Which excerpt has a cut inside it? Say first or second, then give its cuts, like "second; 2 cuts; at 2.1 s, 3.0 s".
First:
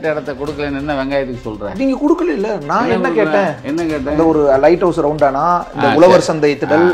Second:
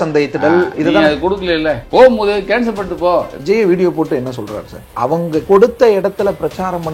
second; 3 cuts; at 1.8 s, 3.3 s, 5.3 s